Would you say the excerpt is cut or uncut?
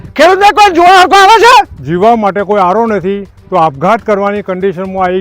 cut